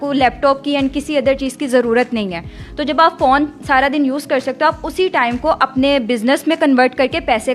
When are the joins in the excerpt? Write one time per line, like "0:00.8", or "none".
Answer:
none